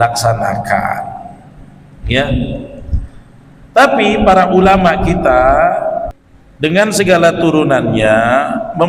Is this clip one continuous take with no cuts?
no; 1 cut; at 6.1 s

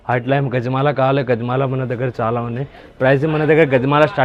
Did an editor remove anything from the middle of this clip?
no; 0 cuts

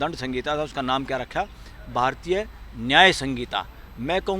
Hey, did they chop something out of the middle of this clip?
no; 0 cuts

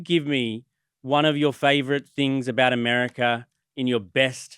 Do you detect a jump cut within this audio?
no; 0 cuts

